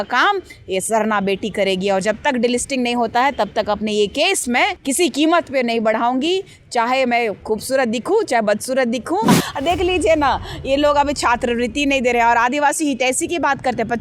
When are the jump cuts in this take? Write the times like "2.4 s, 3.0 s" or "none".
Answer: 4.8 s, 9.4 s